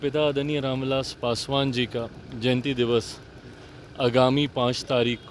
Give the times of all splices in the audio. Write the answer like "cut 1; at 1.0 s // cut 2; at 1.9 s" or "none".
none